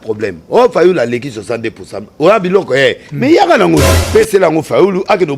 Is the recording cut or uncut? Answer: cut